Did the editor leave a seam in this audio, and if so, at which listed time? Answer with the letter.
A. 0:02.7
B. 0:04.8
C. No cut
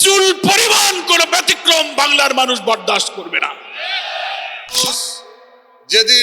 B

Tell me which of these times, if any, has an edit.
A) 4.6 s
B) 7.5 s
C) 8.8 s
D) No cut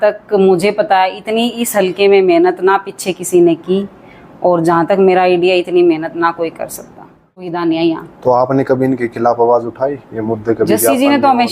B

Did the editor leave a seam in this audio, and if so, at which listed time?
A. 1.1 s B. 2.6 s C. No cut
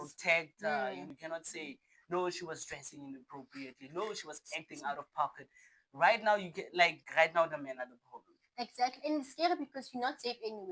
A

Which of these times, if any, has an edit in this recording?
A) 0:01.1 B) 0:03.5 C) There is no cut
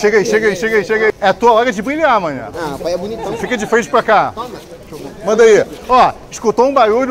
A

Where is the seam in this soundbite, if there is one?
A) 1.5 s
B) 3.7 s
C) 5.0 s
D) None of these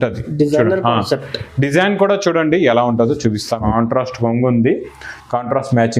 B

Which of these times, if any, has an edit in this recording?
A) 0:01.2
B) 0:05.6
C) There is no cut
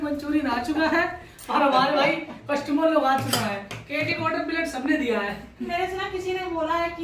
B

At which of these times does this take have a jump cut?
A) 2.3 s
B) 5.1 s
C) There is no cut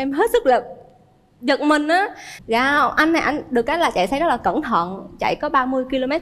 A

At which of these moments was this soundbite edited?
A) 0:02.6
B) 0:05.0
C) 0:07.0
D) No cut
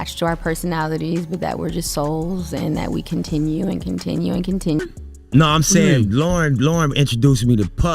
B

